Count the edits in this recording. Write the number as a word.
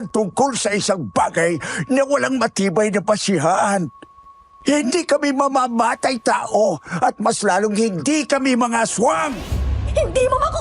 one